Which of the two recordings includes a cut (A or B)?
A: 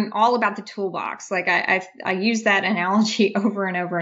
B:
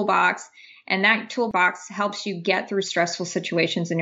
B